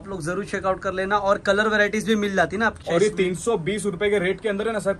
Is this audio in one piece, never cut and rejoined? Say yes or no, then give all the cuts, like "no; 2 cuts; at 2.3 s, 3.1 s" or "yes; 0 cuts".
no; 1 cut; at 2.8 s